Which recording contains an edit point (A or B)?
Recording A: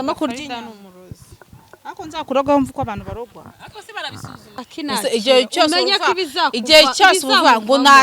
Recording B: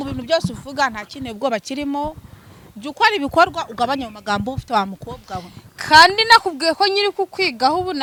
A